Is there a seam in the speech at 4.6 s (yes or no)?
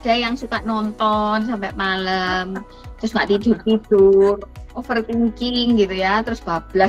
no